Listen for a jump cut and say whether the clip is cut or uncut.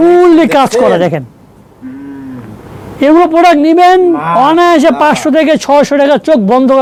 uncut